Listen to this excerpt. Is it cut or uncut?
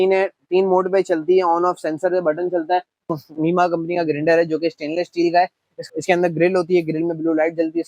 cut